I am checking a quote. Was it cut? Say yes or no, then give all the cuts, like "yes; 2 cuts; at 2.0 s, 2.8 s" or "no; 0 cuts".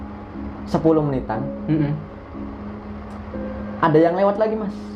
no; 0 cuts